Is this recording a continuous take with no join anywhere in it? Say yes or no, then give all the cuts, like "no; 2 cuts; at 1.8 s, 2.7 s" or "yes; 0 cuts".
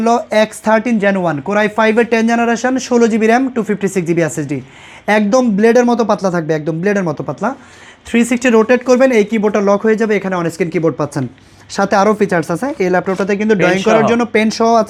yes; 0 cuts